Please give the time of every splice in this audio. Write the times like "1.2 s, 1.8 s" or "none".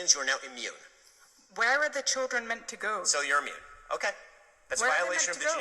none